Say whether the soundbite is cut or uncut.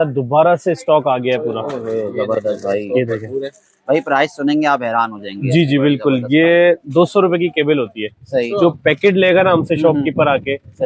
uncut